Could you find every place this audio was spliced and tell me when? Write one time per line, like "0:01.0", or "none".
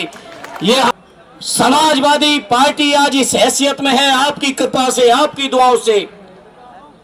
0:00.9